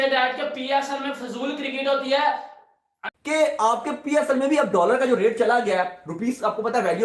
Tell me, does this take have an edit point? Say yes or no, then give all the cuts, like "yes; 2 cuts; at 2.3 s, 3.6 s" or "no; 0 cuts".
yes; 1 cut; at 3.0 s